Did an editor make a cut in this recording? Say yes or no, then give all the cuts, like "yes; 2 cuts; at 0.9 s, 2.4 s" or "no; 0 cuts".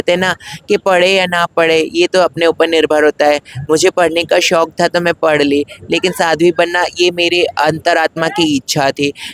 no; 0 cuts